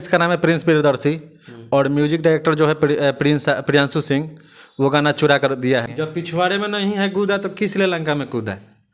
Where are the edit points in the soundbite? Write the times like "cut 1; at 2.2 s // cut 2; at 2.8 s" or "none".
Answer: cut 1; at 5.9 s